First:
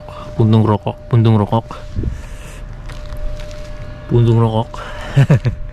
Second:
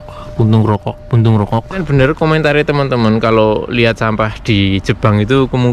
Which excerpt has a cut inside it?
second; 1 cut; at 1.8 s

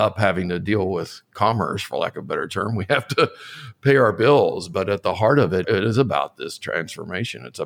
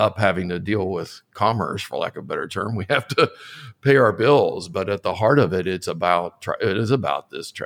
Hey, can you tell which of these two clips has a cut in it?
first; 1 cut; at 5.6 s

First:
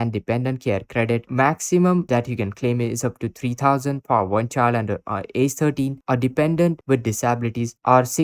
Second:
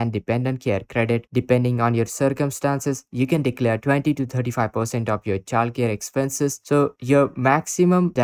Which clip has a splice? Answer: first; 1 cut; at 1.3 s

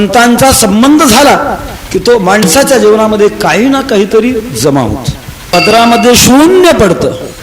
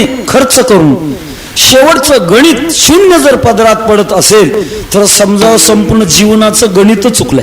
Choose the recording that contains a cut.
first; 1 cut; at 5.4 s

